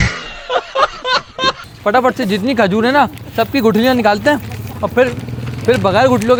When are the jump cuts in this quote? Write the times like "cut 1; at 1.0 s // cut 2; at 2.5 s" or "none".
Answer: none